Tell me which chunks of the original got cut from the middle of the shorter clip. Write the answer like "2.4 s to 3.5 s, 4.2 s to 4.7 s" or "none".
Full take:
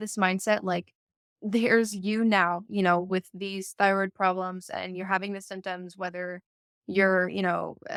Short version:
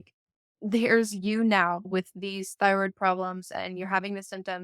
2.7 s to 3.1 s